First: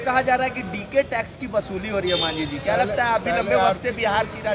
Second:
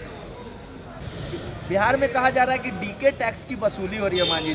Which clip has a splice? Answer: second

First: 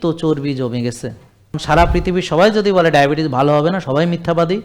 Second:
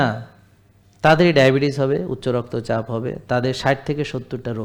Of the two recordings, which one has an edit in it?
first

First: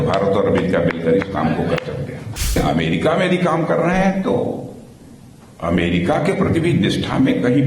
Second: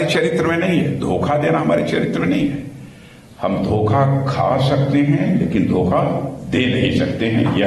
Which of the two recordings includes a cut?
first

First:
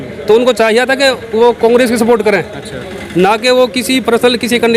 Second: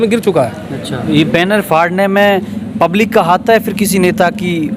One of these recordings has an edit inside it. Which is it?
second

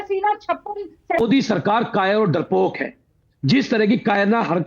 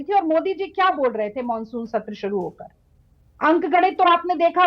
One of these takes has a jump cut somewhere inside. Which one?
first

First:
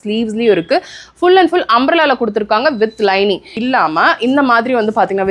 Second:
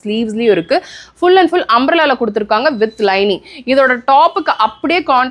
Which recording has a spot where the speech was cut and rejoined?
first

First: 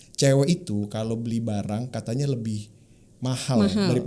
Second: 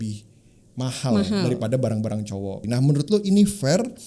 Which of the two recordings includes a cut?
second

